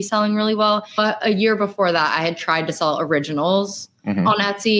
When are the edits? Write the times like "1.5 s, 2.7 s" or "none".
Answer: 1.0 s